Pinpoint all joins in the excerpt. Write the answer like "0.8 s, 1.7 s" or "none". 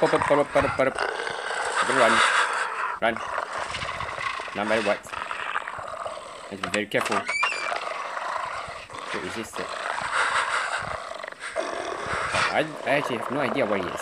none